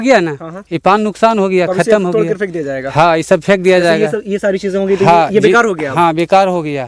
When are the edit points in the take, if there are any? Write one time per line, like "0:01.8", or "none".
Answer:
none